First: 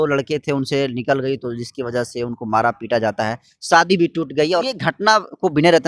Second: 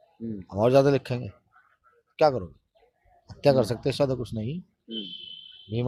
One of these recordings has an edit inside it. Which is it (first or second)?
first